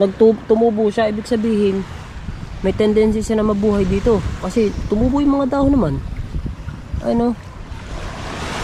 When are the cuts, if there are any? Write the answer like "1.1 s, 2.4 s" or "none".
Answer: none